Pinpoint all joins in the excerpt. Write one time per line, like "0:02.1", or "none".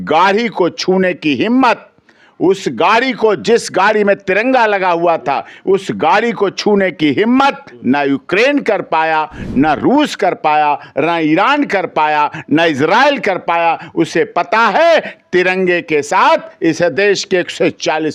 none